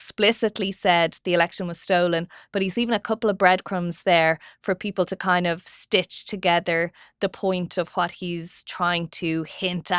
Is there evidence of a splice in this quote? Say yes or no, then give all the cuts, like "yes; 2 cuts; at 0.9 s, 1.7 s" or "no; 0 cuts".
no; 0 cuts